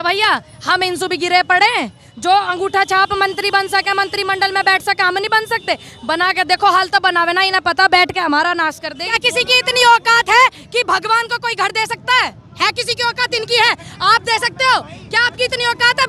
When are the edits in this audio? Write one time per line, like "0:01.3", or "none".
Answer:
0:09.2